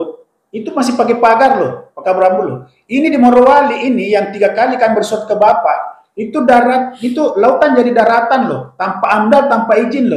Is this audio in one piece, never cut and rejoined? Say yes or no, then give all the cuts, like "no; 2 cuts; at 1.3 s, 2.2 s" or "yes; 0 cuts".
yes; 0 cuts